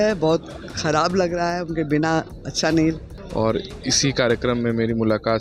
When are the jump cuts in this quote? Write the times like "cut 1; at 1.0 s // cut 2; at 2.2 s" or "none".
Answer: cut 1; at 3.1 s

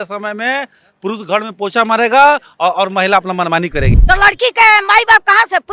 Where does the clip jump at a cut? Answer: cut 1; at 3.9 s

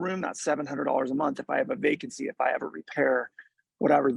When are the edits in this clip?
none

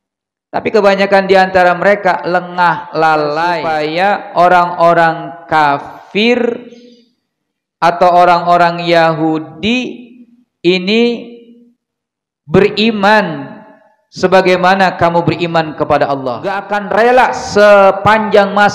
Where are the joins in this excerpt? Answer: cut 1; at 3.7 s // cut 2; at 16.7 s

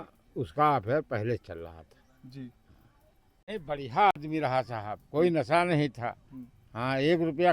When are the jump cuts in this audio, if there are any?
cut 1; at 3.4 s

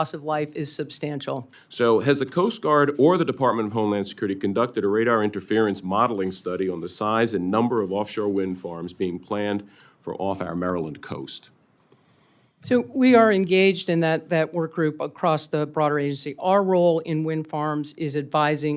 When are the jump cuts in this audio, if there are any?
cut 1; at 1.6 s

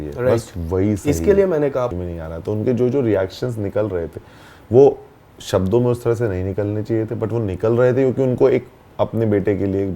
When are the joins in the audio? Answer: cut 1; at 1.9 s

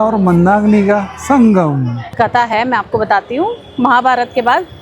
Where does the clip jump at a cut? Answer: cut 1; at 2.1 s

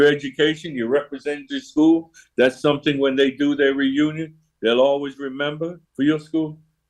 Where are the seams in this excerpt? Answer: cut 1; at 5.8 s

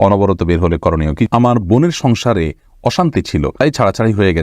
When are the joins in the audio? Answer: cut 1; at 1.3 s // cut 2; at 3.6 s

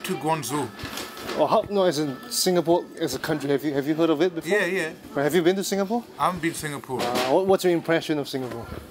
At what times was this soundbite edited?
none

